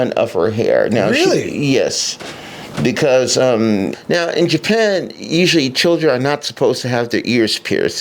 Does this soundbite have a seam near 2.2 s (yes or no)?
no